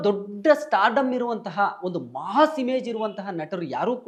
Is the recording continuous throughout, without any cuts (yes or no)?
yes